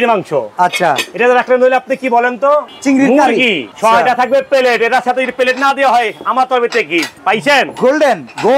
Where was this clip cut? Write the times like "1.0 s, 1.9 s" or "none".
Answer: 2.7 s, 3.7 s, 7.1 s